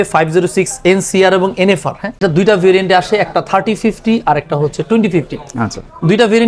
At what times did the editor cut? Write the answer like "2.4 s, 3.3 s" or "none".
2.1 s